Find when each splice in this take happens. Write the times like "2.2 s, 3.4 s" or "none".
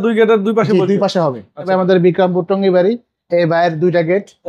1.7 s